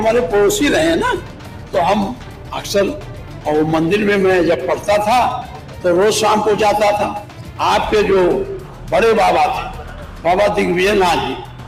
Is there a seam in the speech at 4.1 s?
no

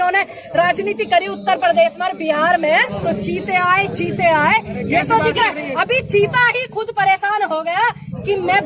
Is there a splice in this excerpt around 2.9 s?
yes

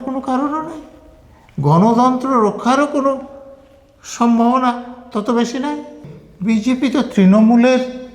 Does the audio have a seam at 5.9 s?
yes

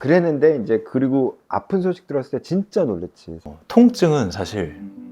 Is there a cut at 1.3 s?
no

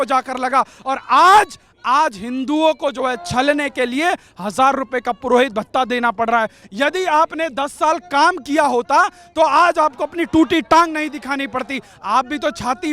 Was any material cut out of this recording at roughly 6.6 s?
yes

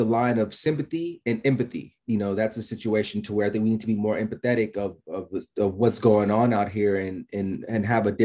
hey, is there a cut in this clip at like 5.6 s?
no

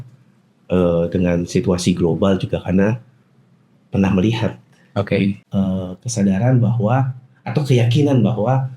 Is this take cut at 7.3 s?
no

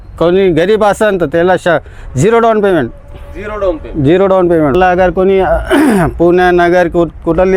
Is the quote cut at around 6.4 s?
no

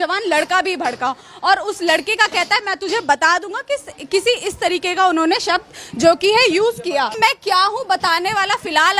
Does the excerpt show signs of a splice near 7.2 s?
yes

